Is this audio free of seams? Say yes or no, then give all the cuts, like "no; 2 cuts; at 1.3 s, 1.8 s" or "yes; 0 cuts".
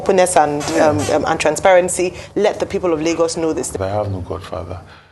no; 1 cut; at 3.8 s